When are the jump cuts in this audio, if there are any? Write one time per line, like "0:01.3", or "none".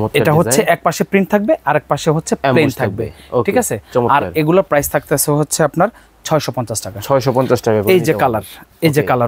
none